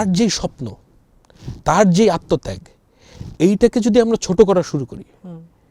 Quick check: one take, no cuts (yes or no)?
yes